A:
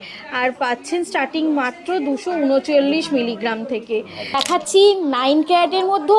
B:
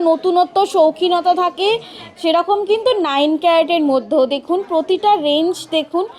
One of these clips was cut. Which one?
A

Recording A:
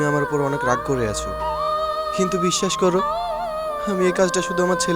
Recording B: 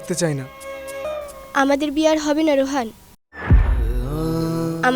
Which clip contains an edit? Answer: B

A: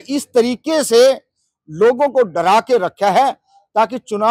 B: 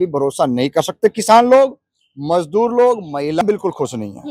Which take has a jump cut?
B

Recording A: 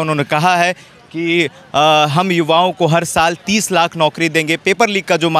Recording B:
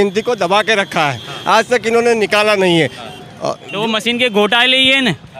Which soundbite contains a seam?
B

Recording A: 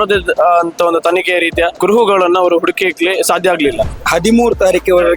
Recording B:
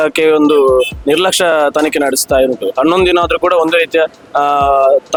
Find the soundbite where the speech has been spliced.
A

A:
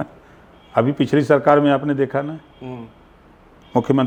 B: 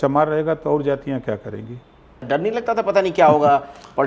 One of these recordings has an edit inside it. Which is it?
B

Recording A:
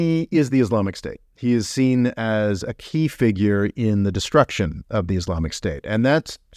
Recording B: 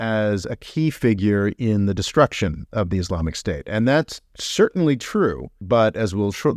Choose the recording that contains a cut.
B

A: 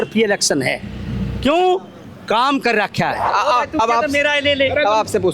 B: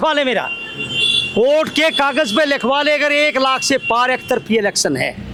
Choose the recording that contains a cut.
A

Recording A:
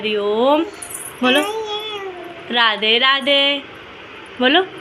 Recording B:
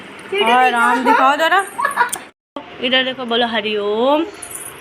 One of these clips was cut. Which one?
B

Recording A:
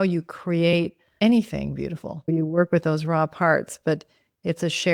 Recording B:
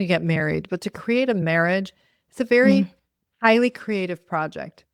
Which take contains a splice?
A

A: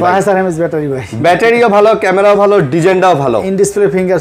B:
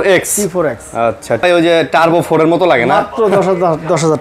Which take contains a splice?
B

